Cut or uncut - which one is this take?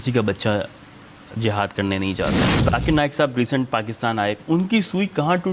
cut